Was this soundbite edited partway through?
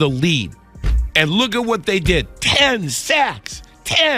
no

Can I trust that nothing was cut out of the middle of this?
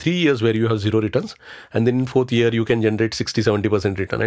no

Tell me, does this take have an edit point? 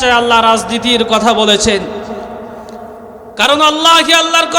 yes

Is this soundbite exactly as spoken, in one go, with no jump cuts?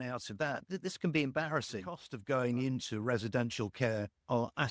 no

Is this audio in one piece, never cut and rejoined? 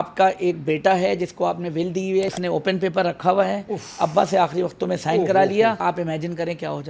no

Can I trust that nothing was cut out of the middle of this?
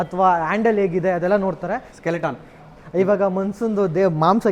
no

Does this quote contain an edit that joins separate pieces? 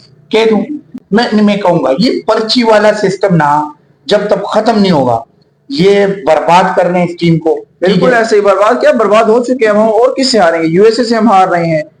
no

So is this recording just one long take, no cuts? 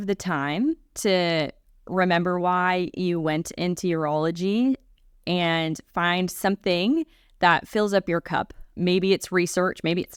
yes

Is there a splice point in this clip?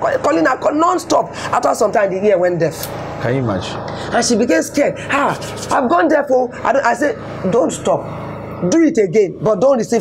no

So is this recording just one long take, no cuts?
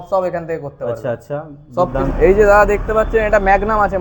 no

